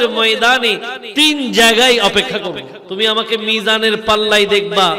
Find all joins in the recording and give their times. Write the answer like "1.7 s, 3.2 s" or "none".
2.8 s